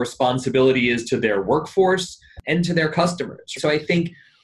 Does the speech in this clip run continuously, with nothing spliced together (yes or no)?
no